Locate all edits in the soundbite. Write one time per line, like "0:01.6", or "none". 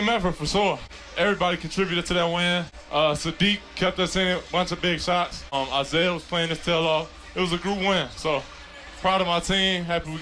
0:00.9
0:02.8
0:05.5